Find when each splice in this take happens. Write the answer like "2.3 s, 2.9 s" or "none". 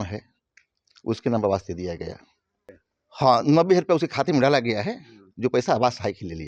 2.7 s